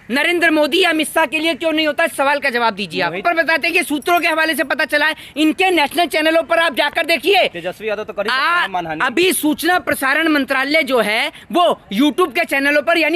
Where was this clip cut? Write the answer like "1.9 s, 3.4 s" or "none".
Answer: 3.2 s